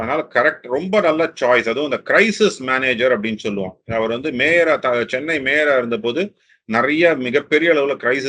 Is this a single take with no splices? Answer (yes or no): yes